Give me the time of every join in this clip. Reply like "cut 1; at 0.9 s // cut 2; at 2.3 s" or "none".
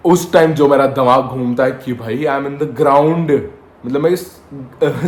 none